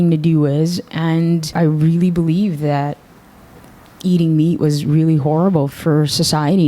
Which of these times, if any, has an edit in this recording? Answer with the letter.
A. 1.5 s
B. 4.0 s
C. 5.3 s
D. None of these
A